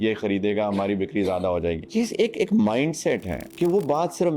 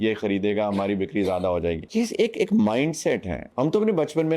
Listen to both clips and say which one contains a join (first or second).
first